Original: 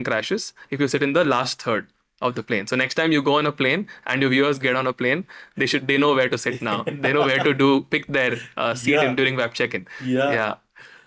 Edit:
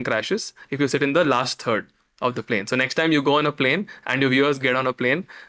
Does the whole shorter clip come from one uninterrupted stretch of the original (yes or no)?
yes